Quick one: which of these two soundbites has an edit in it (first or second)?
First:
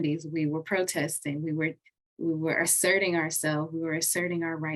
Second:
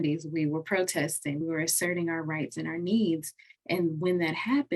second